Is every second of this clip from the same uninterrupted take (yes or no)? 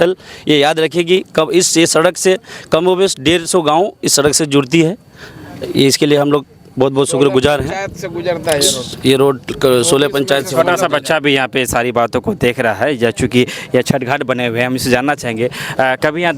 yes